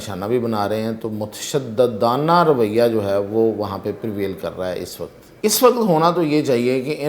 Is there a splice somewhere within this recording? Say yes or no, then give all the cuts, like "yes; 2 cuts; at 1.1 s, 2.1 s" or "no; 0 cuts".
yes; 1 cut; at 5.2 s